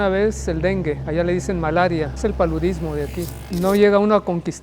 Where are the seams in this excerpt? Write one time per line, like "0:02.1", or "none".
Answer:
0:01.0
0:02.1
0:03.4